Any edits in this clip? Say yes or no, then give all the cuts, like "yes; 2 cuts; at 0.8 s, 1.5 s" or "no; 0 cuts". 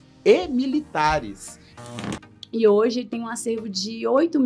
yes; 1 cut; at 1.8 s